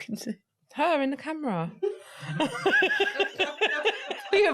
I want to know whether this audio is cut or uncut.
uncut